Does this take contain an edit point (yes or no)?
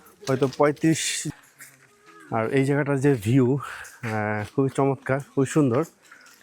yes